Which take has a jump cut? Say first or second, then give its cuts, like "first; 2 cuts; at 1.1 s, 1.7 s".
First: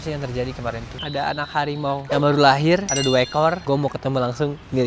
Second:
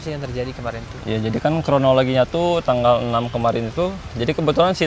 first; 2 cuts; at 0.9 s, 3.6 s